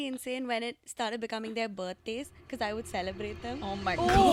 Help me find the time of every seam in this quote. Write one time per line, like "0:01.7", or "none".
none